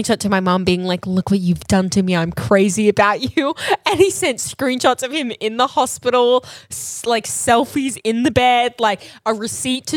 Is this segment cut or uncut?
uncut